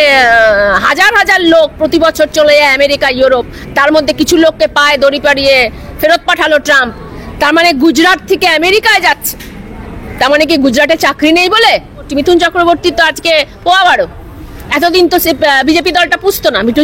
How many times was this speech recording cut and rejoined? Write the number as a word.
one